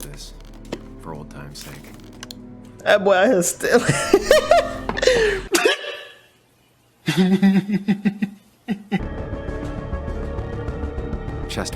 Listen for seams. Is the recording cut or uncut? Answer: cut